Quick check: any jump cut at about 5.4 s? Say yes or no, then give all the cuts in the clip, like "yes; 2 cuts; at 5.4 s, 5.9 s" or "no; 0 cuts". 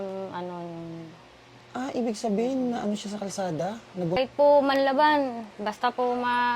no; 1 cut; at 4.2 s